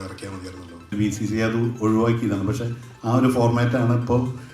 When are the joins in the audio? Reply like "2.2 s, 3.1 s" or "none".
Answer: 0.9 s